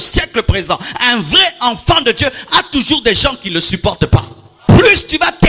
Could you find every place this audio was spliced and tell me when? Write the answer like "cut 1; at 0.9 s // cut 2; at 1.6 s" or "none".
cut 1; at 4.5 s